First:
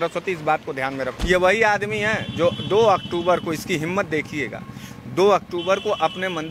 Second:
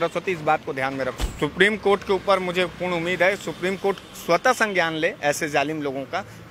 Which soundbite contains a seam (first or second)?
first